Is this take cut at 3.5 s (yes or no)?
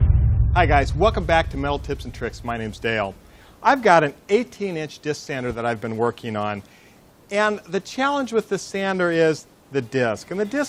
yes